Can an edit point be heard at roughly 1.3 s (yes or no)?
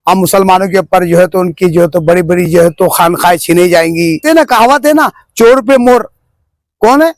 no